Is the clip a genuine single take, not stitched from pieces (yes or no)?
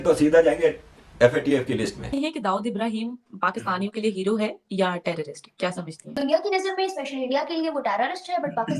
no